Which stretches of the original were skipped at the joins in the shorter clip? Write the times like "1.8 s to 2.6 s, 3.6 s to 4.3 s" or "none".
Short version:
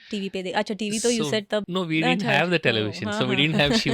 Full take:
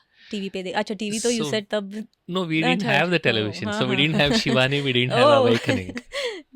1.9 s to 2.3 s